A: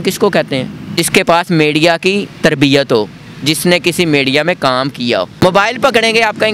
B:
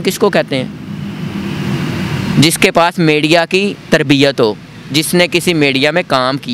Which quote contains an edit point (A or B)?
A